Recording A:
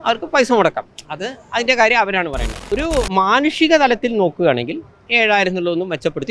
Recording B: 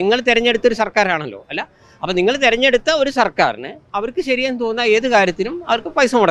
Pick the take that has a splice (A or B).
A